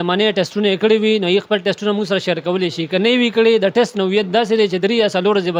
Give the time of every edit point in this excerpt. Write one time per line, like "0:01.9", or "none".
none